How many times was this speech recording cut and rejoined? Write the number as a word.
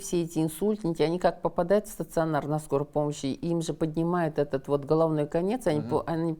zero